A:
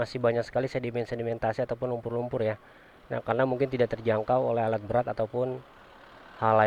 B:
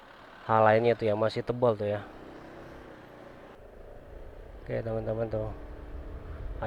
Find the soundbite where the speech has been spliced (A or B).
B